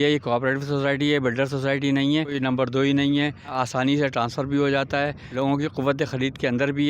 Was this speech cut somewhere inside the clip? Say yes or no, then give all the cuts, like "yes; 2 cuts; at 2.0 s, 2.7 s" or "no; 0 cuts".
yes; 3 cuts; at 2.4 s, 3.5 s, 5.2 s